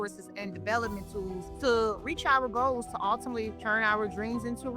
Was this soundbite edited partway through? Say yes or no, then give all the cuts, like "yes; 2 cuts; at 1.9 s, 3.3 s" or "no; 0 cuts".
yes; 2 cuts; at 1.5 s, 3.6 s